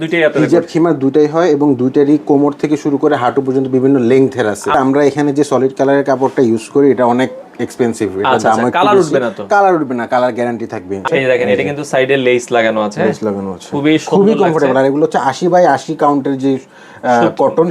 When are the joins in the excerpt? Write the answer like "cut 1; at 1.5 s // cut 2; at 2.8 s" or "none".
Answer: cut 1; at 4.7 s // cut 2; at 11.0 s